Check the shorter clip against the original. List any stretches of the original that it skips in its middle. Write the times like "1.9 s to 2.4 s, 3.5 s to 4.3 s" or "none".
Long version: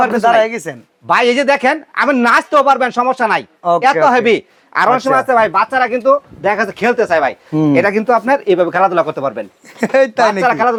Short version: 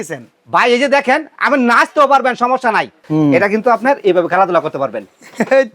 3.5 s to 7.4 s

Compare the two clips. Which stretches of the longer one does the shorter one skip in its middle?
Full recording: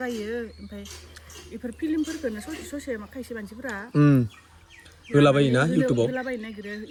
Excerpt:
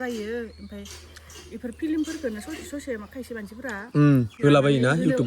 4.3 s to 5.0 s

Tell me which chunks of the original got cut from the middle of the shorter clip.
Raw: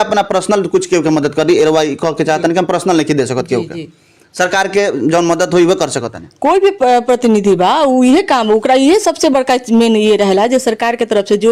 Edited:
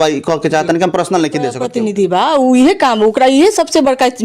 3.4 s to 7.1 s

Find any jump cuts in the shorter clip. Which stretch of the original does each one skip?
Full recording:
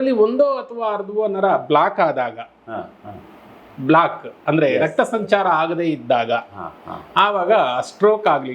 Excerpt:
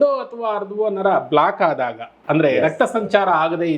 2.5 s to 4.3 s

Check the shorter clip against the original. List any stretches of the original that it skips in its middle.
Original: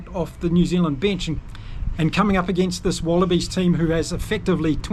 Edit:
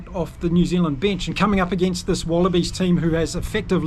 1.4 s to 2.1 s

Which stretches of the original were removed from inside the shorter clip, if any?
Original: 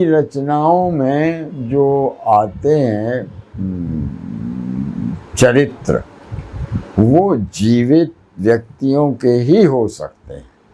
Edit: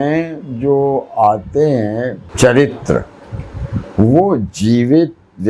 3.3 s to 5.2 s

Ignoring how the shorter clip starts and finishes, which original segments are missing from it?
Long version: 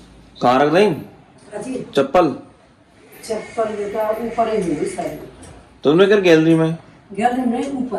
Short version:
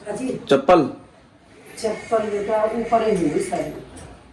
none

